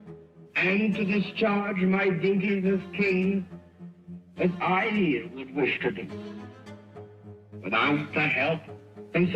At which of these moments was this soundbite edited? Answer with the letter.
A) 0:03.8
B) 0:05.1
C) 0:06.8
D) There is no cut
D